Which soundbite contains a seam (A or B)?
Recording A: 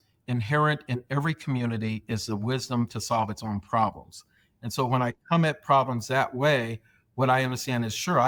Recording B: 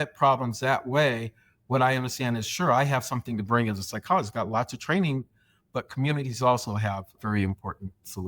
B